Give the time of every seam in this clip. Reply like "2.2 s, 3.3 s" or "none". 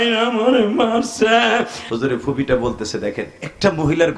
1.8 s